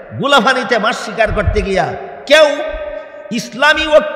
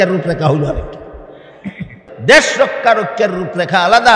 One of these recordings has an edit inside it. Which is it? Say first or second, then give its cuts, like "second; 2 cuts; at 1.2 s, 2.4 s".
second; 1 cut; at 2.1 s